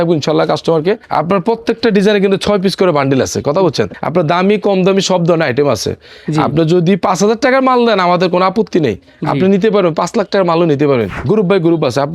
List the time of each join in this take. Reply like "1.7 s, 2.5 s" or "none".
1.0 s, 3.9 s, 11.2 s